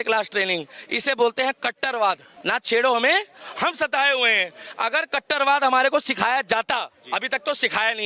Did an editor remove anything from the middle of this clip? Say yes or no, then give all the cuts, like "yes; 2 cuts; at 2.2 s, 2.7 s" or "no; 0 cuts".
yes; 1 cut; at 2.3 s